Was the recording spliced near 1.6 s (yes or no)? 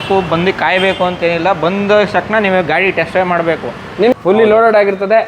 no